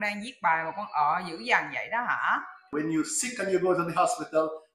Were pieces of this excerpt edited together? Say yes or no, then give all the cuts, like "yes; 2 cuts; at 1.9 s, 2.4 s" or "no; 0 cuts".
yes; 1 cut; at 2.7 s